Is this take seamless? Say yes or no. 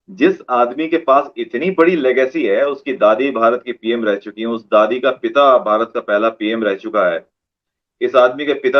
yes